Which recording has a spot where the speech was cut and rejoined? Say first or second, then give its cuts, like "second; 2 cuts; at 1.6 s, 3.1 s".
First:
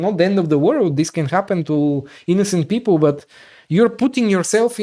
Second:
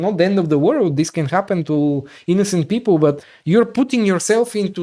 second; 1 cut; at 3.3 s